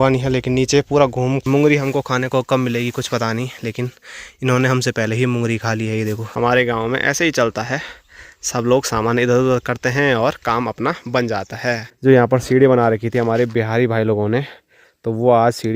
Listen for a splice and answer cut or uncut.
cut